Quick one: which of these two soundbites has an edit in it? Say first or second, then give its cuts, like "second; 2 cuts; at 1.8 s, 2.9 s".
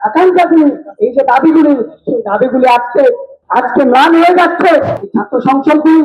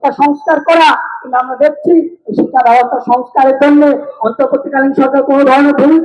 first; 2 cuts; at 3.3 s, 5.0 s